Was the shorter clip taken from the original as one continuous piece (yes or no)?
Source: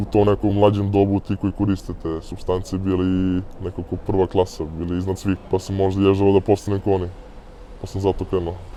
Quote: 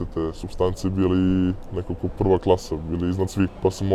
yes